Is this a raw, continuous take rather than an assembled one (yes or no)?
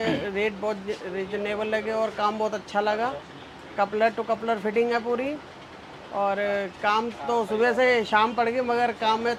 yes